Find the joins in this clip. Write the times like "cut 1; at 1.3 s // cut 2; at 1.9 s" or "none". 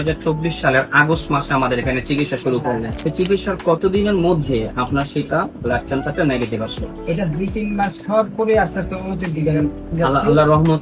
cut 1; at 2.9 s